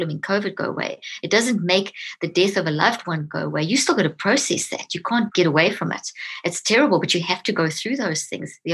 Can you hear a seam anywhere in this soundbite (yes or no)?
yes